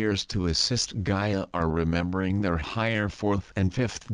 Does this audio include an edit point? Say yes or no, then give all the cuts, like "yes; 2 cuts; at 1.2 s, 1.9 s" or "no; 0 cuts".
no; 0 cuts